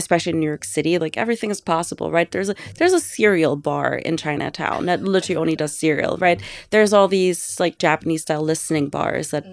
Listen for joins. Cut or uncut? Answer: uncut